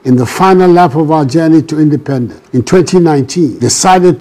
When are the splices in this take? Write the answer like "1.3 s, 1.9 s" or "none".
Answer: 2.3 s

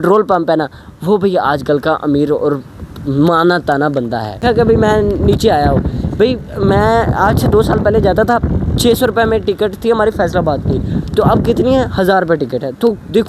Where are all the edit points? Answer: 4.4 s

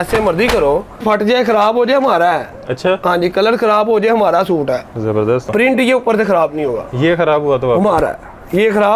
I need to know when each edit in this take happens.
1.0 s, 5.5 s

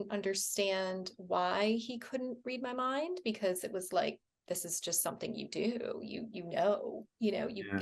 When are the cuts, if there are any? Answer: none

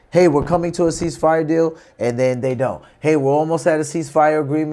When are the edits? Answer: none

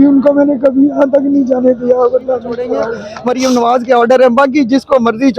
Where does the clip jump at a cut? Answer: 3.0 s

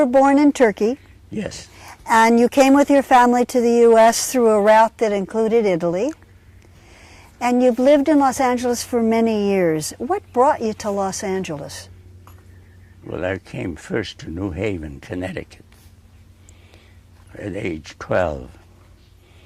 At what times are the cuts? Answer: none

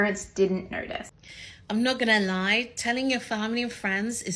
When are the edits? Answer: 1.0 s

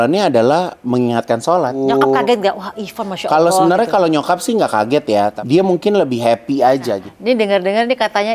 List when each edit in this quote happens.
1.8 s, 5.4 s, 7.1 s

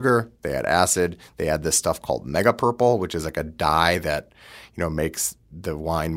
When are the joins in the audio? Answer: none

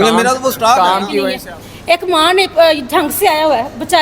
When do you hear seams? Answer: 1.4 s

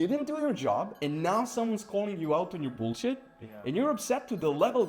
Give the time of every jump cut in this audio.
none

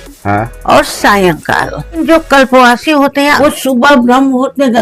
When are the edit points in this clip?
2.0 s, 3.4 s

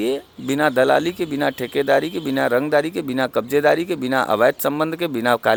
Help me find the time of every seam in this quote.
none

